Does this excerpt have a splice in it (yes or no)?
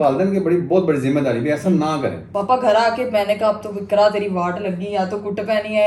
yes